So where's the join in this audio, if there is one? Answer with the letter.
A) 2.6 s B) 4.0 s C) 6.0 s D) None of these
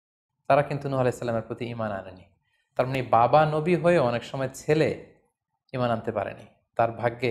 D